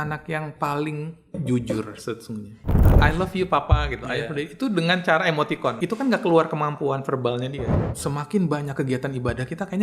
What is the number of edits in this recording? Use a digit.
3